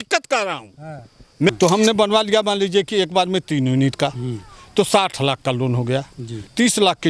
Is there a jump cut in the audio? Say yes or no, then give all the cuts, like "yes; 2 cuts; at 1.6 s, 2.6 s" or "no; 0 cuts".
yes; 1 cut; at 1.5 s